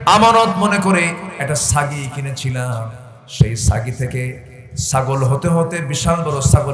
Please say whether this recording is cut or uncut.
uncut